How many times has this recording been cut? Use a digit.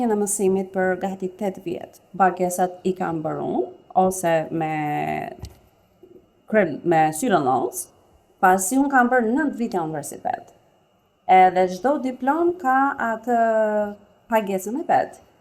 1